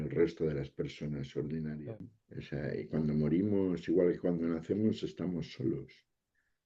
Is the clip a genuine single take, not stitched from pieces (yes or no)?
no